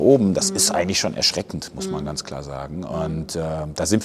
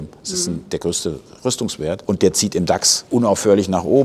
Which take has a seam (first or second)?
second